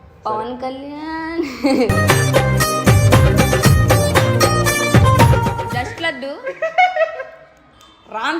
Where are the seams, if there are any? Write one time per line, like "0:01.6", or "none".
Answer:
0:05.6